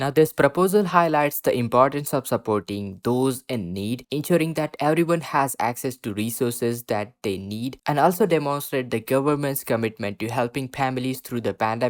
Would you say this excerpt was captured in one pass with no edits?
yes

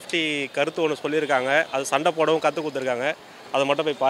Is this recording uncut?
yes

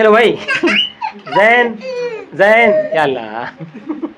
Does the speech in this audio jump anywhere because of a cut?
no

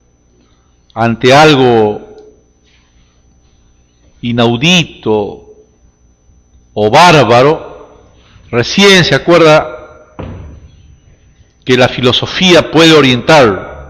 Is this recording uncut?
no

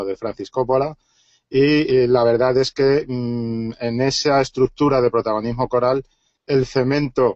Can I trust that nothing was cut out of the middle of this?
no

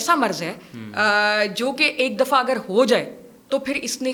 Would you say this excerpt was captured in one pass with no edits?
yes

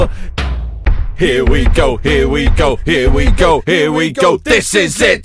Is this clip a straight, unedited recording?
yes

